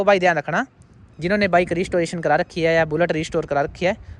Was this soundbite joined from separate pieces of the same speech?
no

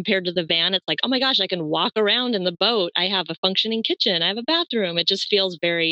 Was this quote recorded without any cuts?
yes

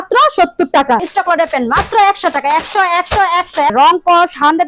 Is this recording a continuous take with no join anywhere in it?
no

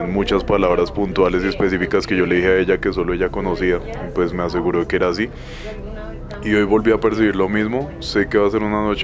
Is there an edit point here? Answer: no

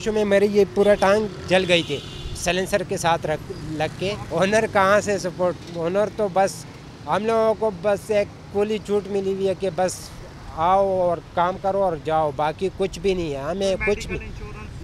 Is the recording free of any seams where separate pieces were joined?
yes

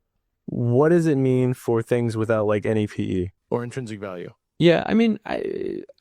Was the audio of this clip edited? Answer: yes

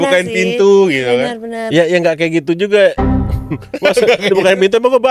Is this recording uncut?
yes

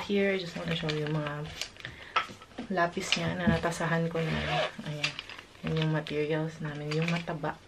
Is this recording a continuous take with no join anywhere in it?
yes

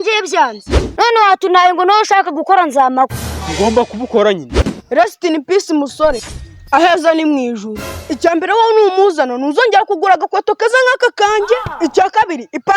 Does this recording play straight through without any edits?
no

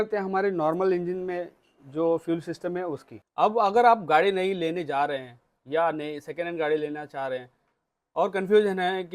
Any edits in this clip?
yes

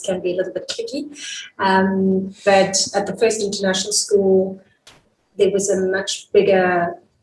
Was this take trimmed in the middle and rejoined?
no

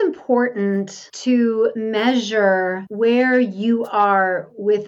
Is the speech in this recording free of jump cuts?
no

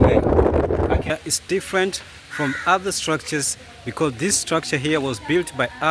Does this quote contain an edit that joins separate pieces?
yes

